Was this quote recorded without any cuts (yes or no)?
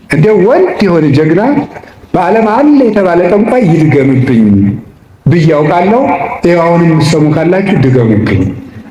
yes